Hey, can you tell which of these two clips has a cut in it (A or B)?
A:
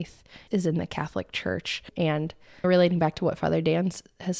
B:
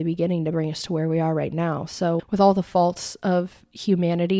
A